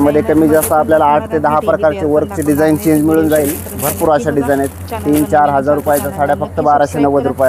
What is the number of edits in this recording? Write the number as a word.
zero